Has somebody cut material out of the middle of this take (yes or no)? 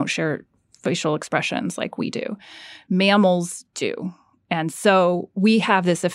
no